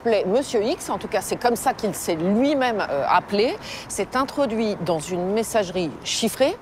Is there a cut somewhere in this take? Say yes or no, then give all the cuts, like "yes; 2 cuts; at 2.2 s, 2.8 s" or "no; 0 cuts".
no; 0 cuts